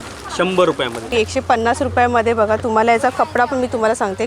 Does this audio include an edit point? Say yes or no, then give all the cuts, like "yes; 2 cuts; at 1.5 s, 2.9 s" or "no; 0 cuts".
yes; 1 cut; at 1.1 s